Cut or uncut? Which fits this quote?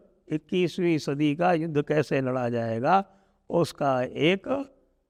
uncut